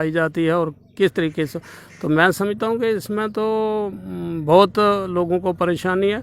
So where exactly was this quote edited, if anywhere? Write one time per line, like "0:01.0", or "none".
none